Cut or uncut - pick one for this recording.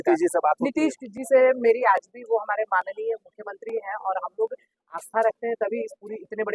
uncut